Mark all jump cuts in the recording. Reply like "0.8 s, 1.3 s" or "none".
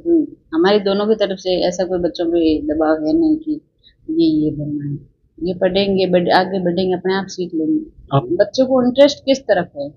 8.2 s